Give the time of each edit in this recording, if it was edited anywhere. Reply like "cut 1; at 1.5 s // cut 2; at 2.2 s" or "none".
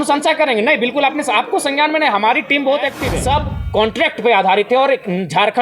cut 1; at 3.1 s